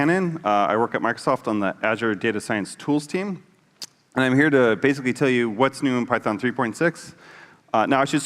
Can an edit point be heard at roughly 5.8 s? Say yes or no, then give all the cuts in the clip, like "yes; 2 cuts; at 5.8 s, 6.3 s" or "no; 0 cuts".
no; 1 cut; at 4.2 s